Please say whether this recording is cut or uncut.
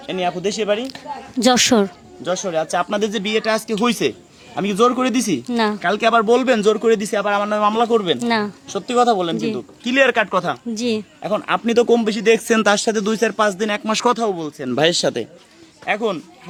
uncut